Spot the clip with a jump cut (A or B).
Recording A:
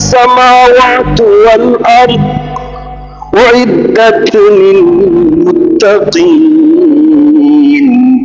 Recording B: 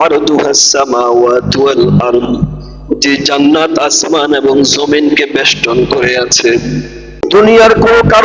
B